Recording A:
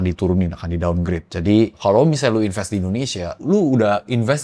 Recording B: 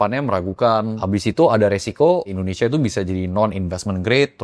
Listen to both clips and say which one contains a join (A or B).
B